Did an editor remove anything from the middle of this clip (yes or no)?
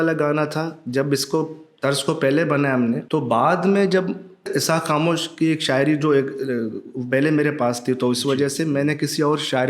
yes